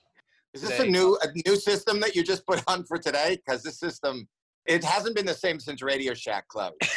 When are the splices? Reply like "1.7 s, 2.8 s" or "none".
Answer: none